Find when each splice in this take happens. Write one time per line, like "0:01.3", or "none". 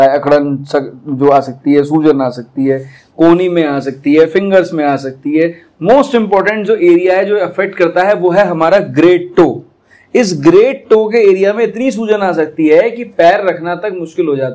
none